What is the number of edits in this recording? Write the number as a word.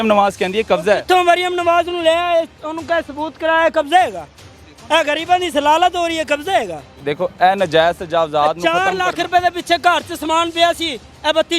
one